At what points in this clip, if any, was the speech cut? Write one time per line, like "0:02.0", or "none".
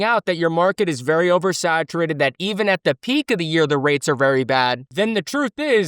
none